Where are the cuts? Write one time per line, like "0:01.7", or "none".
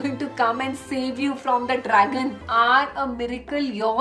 0:02.4